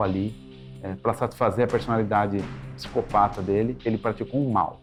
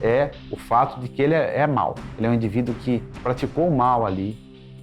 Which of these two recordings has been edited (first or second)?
second